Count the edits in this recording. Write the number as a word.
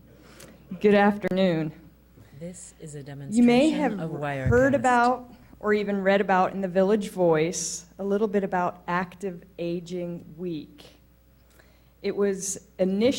two